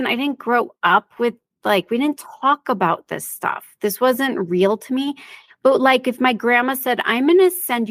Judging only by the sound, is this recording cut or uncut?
uncut